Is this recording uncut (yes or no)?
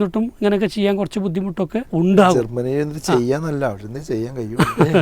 no